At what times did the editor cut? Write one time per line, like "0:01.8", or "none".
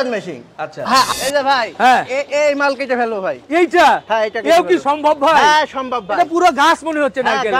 0:01.1